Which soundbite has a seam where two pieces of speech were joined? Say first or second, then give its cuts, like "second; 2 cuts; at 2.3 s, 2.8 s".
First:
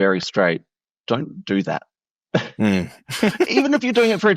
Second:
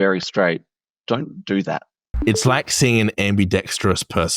second; 1 cut; at 2.1 s